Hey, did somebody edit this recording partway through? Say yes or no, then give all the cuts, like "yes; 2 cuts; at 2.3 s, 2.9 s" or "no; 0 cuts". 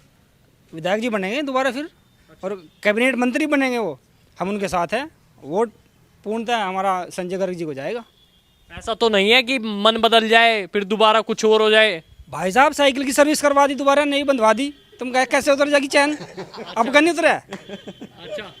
no; 0 cuts